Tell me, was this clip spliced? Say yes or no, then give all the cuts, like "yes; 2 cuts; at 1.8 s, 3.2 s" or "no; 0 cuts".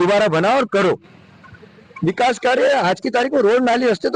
no; 0 cuts